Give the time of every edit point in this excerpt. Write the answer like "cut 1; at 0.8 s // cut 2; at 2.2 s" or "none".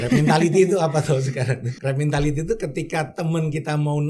cut 1; at 1.7 s